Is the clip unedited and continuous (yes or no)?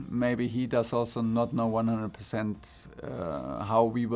yes